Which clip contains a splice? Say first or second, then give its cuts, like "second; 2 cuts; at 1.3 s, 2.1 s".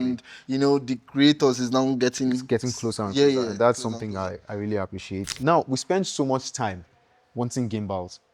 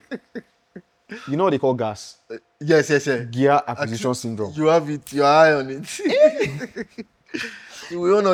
first; 1 cut; at 5.4 s